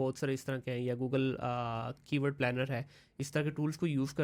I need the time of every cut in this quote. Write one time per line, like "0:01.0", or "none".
none